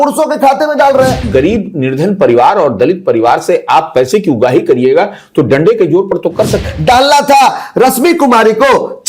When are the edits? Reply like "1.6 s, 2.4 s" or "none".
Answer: 1.2 s, 6.6 s